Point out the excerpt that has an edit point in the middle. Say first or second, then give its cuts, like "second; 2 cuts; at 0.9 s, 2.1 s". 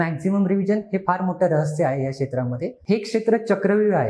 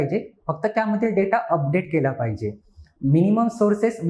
first; 1 cut; at 2.7 s